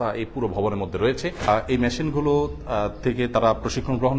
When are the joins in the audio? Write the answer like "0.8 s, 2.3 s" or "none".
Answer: 1.4 s